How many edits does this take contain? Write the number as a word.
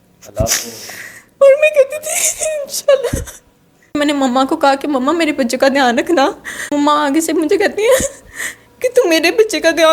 two